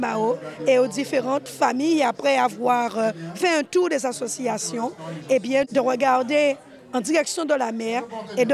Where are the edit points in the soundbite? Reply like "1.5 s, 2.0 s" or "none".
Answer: 5.7 s